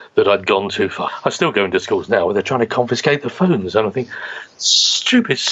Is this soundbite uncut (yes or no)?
no